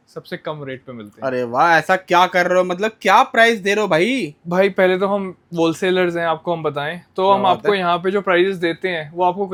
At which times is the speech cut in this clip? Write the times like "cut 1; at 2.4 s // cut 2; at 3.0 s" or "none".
none